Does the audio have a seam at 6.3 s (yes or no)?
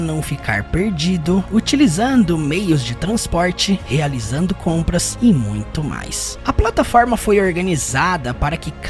yes